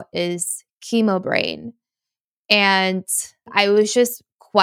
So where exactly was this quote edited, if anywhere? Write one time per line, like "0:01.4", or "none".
0:03.4

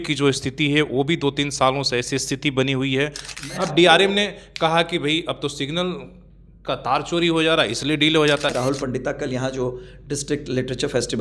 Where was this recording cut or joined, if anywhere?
0:03.3
0:08.5

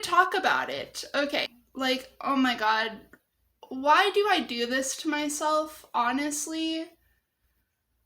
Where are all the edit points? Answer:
0:01.2

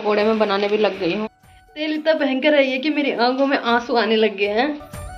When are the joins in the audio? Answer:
none

